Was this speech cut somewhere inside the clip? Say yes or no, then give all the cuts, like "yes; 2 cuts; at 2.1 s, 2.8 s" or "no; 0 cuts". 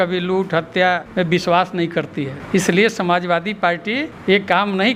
no; 0 cuts